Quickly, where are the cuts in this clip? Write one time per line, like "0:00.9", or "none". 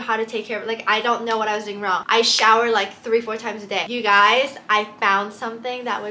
0:03.9

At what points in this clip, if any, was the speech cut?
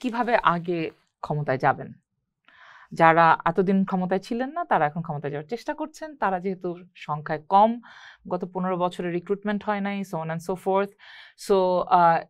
none

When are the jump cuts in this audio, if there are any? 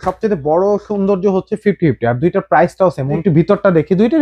0:03.2

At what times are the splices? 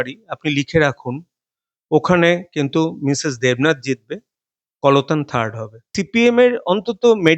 0:06.0

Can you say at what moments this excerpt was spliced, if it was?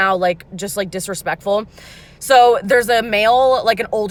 none

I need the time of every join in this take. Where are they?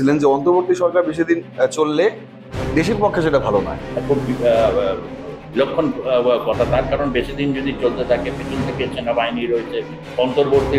none

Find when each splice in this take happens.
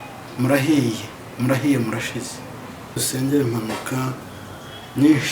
0:03.0

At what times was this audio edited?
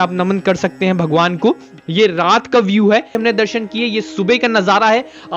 0:03.2

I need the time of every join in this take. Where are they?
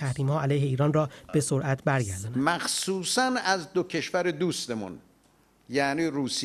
0:02.2

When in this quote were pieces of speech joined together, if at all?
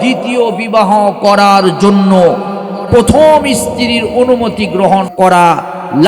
0:05.1

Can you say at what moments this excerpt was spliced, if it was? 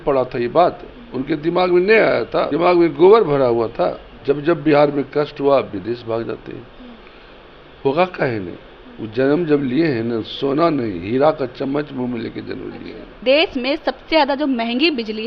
0:02.5
0:04.1
0:13.2

